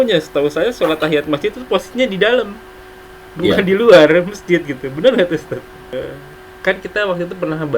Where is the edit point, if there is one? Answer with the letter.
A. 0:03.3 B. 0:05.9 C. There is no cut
B